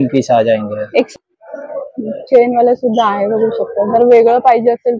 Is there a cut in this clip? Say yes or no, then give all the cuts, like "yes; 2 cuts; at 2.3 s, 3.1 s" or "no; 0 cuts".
yes; 1 cut; at 1.1 s